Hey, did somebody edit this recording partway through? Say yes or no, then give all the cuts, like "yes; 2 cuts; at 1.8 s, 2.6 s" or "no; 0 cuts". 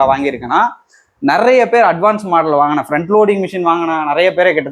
no; 0 cuts